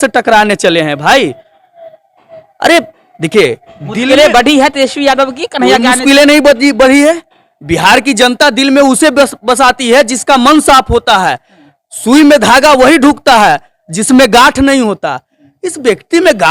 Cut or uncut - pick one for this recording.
uncut